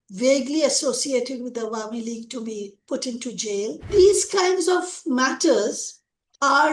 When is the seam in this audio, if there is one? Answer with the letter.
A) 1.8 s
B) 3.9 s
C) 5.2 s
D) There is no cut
B